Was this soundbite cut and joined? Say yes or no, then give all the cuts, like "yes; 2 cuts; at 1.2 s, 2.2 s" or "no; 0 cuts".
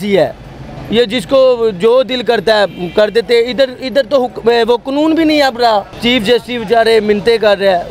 yes; 1 cut; at 5.9 s